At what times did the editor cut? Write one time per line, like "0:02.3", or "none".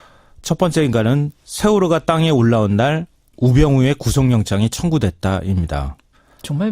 0:04.0